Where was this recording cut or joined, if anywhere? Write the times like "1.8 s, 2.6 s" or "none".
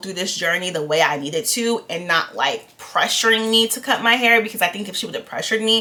none